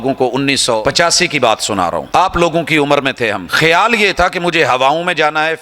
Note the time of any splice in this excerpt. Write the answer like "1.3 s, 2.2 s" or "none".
0.8 s, 2.1 s, 3.5 s